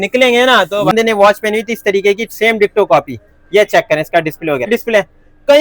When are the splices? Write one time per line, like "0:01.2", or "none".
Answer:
0:00.9
0:04.7